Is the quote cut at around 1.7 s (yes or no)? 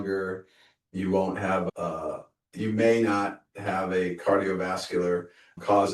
yes